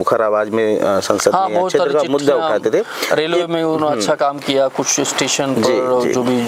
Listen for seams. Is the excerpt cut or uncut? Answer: uncut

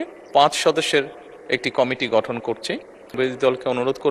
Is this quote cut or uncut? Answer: cut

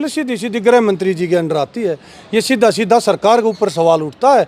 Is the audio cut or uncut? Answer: uncut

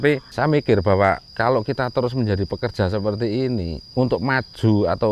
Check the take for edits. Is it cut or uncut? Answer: cut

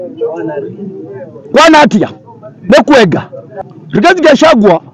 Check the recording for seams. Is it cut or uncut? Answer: cut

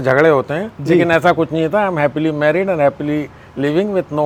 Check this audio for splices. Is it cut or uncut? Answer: uncut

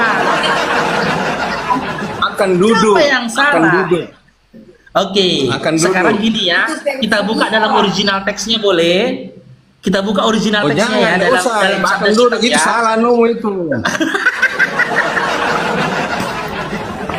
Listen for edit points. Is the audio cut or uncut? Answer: uncut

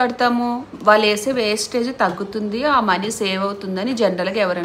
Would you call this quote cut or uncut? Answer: uncut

